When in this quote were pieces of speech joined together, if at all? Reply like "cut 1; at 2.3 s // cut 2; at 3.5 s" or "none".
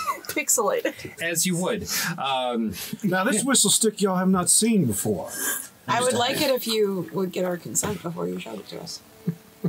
cut 1; at 5.9 s